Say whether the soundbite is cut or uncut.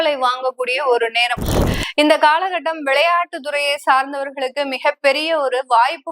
cut